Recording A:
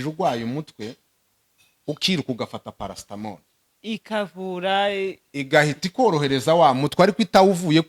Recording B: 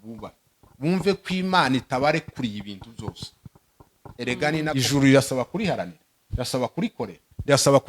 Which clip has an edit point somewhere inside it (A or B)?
B